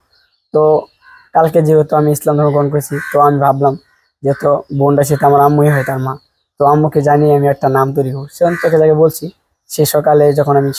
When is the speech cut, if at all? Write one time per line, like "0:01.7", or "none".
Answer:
none